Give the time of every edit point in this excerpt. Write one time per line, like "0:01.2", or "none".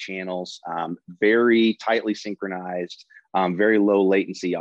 none

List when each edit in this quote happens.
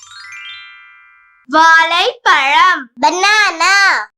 0:01.3

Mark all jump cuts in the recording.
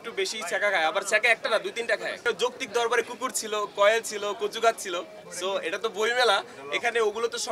0:02.3

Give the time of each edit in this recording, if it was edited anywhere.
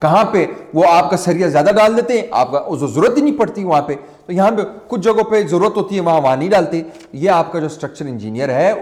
none

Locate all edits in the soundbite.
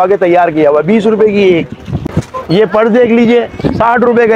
0:02.0

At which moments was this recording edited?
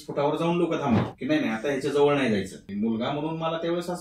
0:01.1
0:02.6

